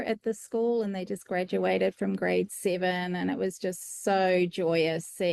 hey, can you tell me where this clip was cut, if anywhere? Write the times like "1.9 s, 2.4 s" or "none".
none